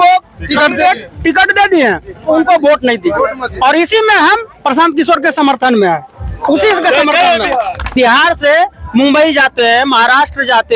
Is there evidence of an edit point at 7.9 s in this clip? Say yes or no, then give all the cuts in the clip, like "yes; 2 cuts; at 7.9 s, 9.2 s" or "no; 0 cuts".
yes; 1 cut; at 7.9 s